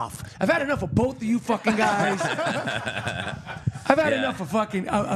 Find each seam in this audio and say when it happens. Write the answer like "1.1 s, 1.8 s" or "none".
none